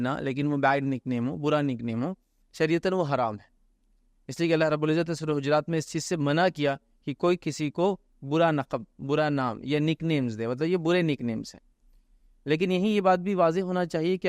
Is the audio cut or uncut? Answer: uncut